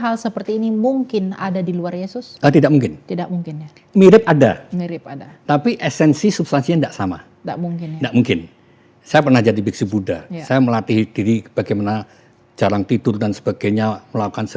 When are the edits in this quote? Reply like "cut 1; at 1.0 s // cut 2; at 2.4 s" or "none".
cut 1; at 2.2 s // cut 2; at 3.8 s